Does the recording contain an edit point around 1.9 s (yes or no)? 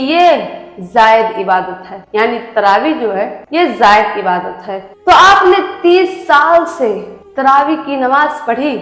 no